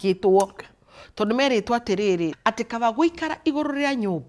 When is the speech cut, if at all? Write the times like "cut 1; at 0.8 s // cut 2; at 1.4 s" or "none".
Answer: cut 1; at 2.4 s